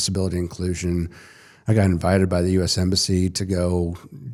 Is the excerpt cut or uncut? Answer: uncut